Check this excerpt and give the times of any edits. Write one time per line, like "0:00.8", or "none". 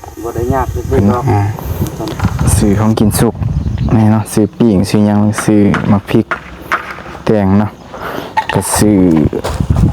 0:02.3

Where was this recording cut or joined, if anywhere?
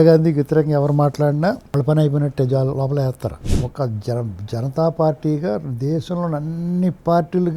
0:01.6
0:03.4

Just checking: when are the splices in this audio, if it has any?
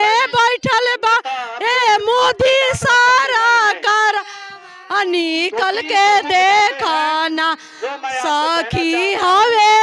none

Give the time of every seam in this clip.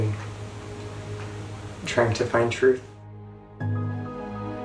none

